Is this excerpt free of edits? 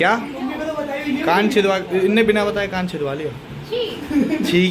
yes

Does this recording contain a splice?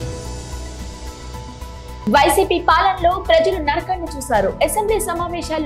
yes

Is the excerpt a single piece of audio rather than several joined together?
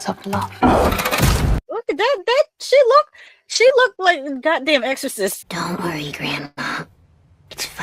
no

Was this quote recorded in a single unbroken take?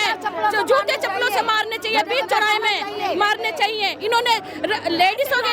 yes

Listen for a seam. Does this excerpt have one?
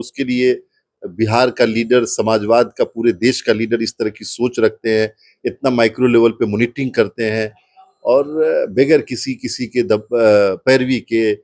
no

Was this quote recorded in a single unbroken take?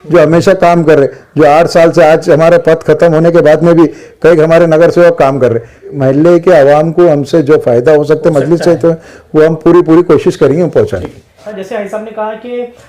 no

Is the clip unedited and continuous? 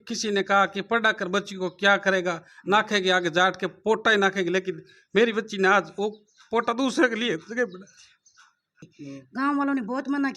no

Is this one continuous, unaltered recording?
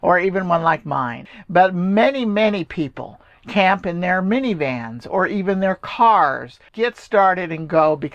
no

